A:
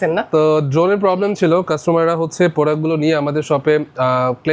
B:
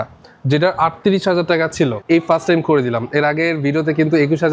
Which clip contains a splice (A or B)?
B